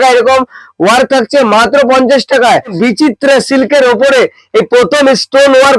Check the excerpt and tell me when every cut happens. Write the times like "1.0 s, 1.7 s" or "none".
2.8 s